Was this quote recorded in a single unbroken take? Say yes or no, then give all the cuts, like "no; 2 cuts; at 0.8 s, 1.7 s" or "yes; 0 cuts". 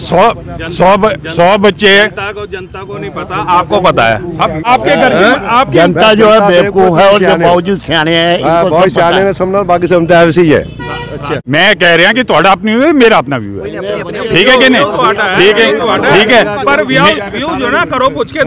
no; 2 cuts; at 4.7 s, 11.4 s